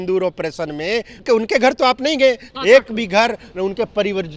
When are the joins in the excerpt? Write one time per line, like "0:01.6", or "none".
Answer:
0:01.2
0:02.5